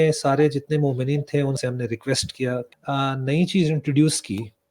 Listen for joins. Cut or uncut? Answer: cut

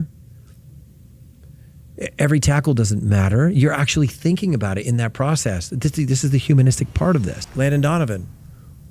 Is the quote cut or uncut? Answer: cut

